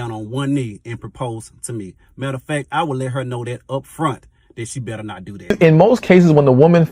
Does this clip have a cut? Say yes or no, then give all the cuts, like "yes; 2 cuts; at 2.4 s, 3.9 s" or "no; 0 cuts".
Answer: yes; 1 cut; at 5.6 s